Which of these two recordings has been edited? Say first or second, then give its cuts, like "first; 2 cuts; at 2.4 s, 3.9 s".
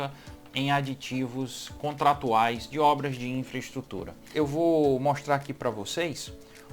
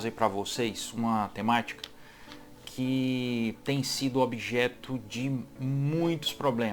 first; 1 cut; at 4.3 s